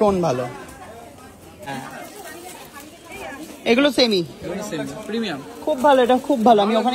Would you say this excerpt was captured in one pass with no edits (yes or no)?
no